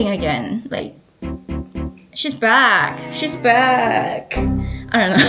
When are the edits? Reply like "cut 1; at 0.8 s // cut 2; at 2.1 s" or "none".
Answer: none